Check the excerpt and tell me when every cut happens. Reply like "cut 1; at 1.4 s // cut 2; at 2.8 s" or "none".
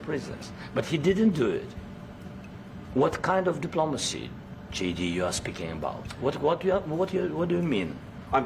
none